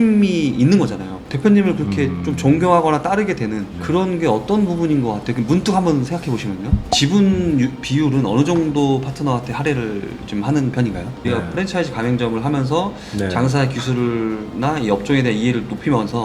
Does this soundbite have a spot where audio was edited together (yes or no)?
yes